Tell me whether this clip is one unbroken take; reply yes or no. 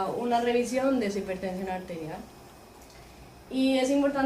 no